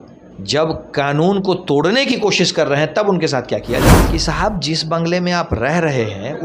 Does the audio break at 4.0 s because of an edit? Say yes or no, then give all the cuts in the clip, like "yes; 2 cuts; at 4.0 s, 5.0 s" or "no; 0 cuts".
yes; 1 cut; at 4.0 s